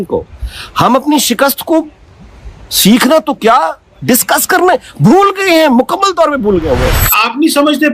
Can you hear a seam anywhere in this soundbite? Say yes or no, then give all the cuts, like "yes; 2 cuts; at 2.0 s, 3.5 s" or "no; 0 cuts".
yes; 1 cut; at 7.0 s